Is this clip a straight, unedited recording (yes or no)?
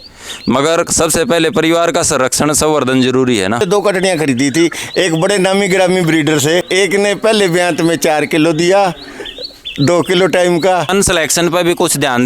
no